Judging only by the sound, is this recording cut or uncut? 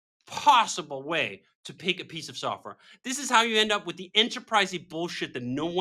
uncut